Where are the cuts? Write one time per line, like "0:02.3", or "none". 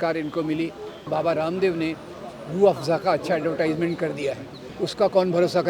0:01.1
0:04.7